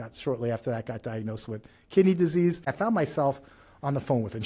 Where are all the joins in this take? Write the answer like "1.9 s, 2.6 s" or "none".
2.7 s